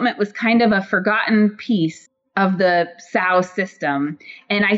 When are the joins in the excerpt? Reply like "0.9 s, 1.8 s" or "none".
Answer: none